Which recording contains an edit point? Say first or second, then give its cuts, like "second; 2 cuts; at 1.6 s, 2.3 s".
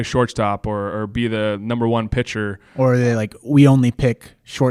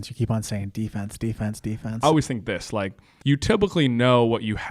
second; 2 cuts; at 1.9 s, 3.0 s